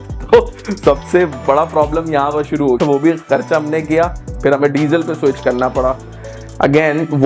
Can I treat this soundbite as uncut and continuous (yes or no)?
no